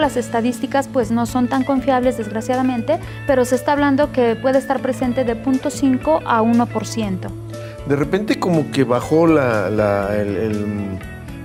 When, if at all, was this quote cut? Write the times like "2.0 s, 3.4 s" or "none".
none